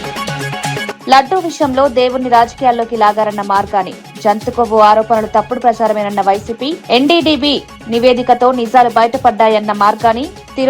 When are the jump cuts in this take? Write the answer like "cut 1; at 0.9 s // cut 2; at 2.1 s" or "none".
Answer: cut 1; at 1.0 s